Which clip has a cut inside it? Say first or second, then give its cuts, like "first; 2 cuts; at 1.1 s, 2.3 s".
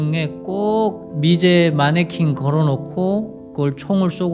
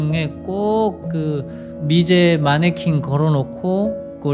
first; 1 cut; at 1.0 s